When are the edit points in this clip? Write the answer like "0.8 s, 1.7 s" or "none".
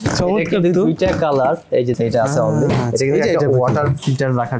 2.0 s